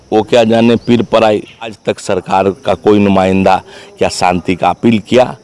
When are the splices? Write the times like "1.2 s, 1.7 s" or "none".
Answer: 1.8 s